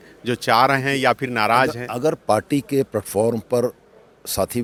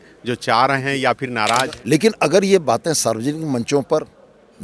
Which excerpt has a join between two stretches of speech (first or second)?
second